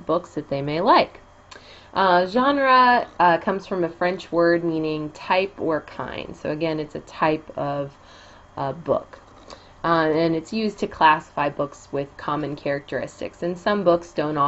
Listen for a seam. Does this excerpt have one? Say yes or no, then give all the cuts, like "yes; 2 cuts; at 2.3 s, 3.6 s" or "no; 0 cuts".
no; 0 cuts